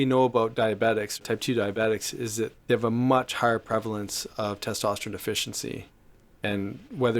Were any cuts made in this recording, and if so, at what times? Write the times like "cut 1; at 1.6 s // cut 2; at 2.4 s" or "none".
cut 1; at 2.5 s